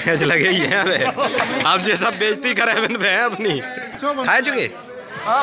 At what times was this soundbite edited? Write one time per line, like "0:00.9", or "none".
0:03.9